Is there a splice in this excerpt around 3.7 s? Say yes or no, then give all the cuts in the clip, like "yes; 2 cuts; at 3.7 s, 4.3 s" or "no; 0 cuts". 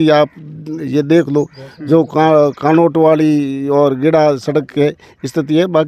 no; 0 cuts